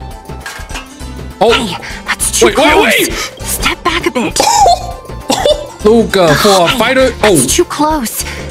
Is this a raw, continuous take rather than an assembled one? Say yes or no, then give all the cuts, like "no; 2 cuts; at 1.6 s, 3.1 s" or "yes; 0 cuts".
yes; 0 cuts